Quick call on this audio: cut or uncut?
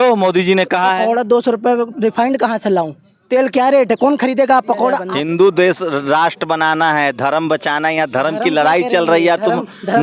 cut